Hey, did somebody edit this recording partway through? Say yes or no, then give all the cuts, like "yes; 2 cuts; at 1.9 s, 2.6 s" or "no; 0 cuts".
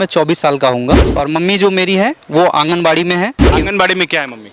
yes; 2 cuts; at 1.2 s, 3.6 s